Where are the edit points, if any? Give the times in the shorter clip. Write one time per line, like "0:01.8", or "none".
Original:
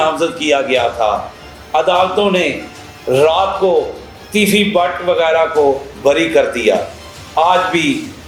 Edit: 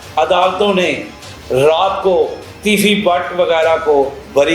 0:02.5